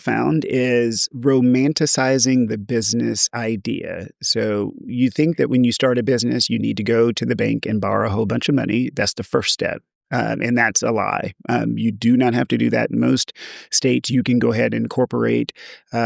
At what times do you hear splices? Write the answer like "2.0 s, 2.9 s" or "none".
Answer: 1.1 s